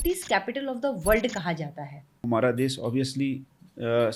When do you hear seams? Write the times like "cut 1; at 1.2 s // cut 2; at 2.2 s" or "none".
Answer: cut 1; at 2.2 s